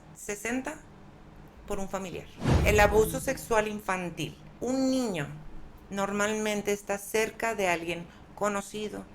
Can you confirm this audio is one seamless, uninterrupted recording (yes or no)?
no